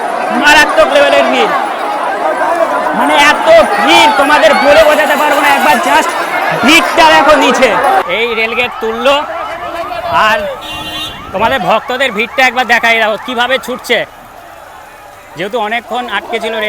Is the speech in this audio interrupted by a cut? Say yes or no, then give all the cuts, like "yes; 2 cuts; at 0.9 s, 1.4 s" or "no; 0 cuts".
yes; 1 cut; at 8.1 s